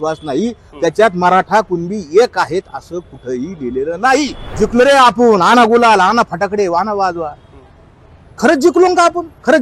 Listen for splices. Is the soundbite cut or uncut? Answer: cut